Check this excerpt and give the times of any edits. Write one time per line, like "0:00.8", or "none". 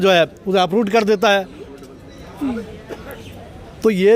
none

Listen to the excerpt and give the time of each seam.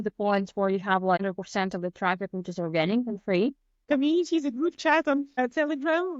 0:01.2
0:03.9
0:05.3

